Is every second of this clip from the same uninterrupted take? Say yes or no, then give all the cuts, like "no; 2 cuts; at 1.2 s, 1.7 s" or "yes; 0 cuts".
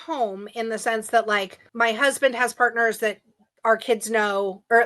no; 1 cut; at 1.6 s